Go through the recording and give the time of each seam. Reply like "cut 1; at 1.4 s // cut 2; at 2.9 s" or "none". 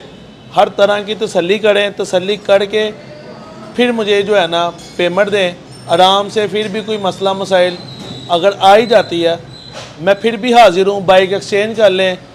none